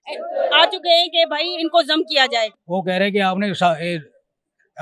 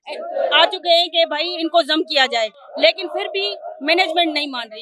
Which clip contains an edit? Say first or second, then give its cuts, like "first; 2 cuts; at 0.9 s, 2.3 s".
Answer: first; 1 cut; at 2.6 s